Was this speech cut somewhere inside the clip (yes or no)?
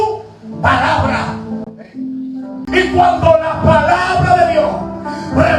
yes